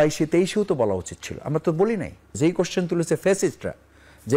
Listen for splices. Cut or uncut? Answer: cut